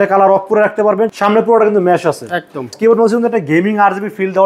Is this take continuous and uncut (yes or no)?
no